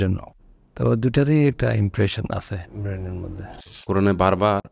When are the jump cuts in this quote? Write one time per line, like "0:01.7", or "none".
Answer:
0:03.7